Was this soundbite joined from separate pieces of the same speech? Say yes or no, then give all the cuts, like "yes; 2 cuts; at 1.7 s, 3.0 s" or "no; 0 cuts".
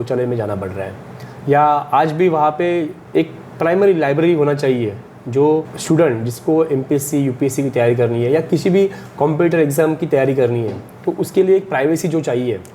yes; 2 cuts; at 3.0 s, 5.7 s